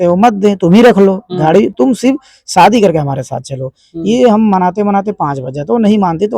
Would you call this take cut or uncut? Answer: uncut